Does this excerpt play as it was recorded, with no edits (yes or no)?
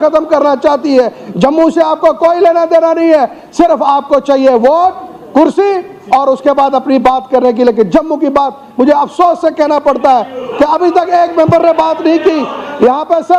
yes